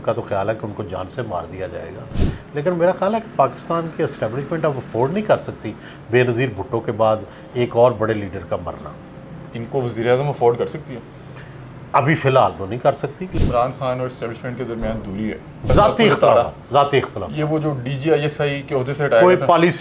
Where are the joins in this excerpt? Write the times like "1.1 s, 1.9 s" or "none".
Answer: 13.3 s, 15.7 s